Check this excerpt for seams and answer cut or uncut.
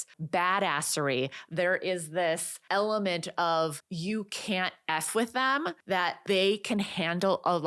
cut